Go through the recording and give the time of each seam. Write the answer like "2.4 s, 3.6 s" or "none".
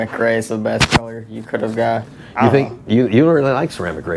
2.2 s